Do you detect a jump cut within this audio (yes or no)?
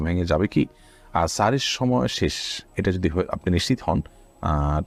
no